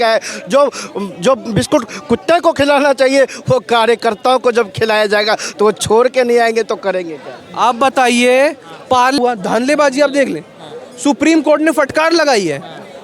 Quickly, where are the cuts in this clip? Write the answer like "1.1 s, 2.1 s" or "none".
9.2 s